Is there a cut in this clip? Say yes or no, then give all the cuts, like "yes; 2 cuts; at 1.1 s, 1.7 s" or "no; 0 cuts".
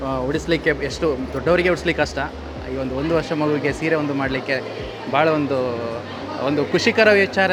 no; 0 cuts